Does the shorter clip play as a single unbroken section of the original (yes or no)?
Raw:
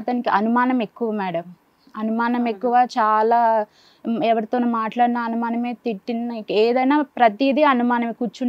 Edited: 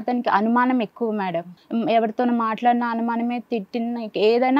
no